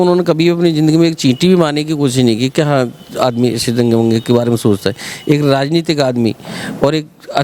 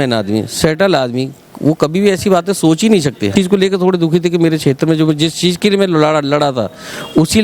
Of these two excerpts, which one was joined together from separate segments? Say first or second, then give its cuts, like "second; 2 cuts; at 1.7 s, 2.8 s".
second; 1 cut; at 3.3 s